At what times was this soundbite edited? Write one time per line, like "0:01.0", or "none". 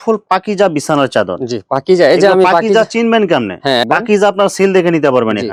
none